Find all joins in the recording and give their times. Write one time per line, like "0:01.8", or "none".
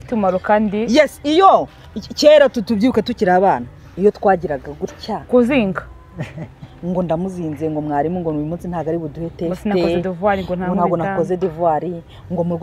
none